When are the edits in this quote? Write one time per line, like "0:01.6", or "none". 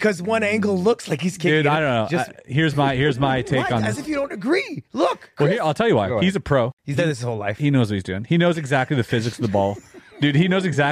0:06.1
0:06.8

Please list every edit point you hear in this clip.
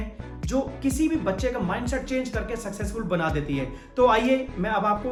none

